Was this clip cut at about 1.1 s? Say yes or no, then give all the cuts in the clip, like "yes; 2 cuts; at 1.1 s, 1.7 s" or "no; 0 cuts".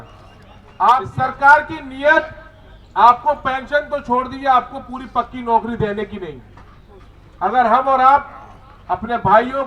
yes; 1 cut; at 1.1 s